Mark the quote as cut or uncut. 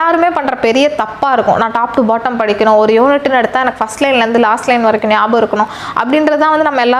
uncut